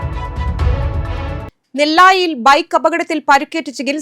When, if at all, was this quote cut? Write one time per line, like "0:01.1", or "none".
none

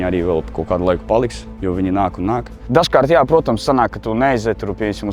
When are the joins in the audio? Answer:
0:02.7

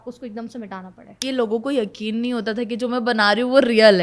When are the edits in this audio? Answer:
0:01.2

